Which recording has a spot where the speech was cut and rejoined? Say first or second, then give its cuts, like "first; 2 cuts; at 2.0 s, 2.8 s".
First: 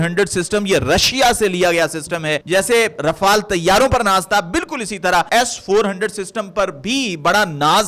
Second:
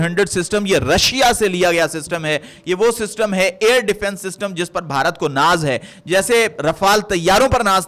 first; 2 cuts; at 2.4 s, 5.3 s